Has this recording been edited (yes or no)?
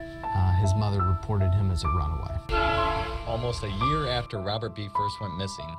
yes